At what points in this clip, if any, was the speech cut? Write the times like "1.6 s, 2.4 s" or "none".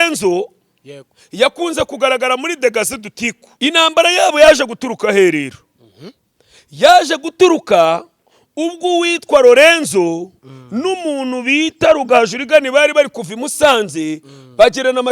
3.4 s